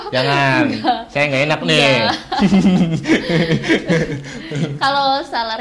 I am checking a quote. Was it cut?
no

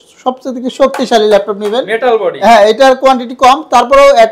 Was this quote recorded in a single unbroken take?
yes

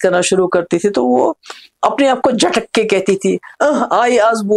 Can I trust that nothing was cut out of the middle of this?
yes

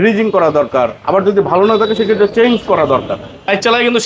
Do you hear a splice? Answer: no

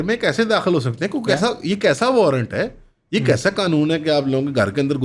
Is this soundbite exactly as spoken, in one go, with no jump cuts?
yes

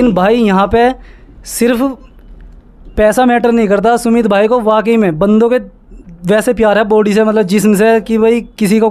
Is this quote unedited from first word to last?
yes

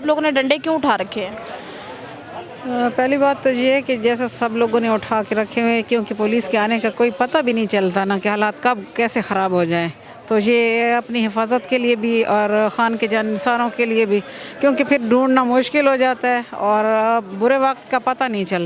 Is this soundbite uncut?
yes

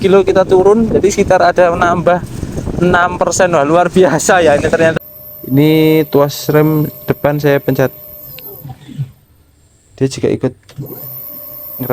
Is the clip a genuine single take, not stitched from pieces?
no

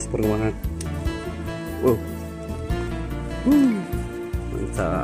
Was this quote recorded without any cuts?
no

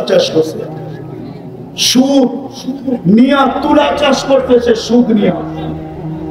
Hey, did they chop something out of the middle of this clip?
yes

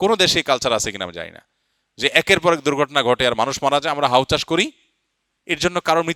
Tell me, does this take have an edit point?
no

